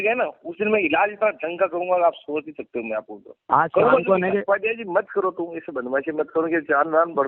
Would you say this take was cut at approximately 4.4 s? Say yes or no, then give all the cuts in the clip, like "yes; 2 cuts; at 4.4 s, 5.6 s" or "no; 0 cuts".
yes; 1 cut; at 4.4 s